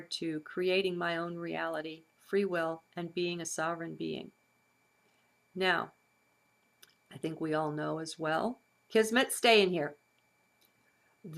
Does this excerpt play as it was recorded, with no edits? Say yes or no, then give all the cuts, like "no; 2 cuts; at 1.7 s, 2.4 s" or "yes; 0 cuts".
no; 1 cut; at 9.3 s